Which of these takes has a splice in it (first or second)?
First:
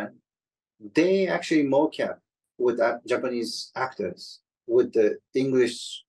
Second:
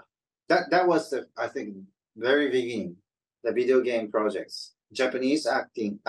second